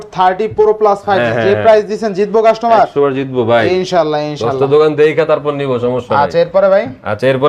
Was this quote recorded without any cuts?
yes; 0 cuts

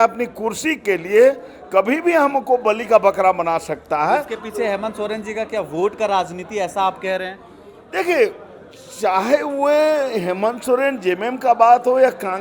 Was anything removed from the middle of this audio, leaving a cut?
no; 0 cuts

